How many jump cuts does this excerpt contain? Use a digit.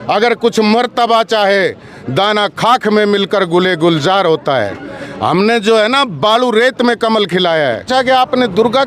1